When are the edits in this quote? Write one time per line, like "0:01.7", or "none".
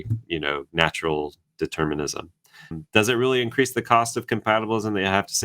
0:02.8